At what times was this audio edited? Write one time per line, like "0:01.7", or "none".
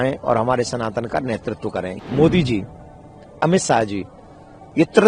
0:02.0